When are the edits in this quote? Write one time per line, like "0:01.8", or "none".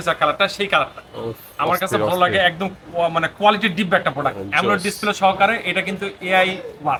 none